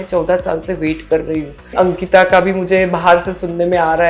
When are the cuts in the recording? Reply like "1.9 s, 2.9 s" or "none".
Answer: 1.7 s